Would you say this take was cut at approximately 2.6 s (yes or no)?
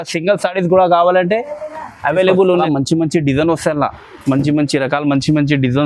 yes